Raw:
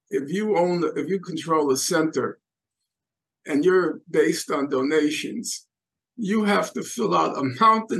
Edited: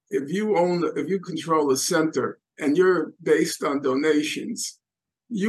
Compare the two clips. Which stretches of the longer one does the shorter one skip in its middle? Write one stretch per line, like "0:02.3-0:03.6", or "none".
0:02.4-0:03.3